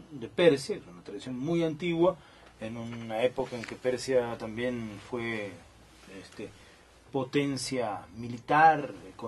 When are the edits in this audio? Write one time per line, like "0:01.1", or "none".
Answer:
none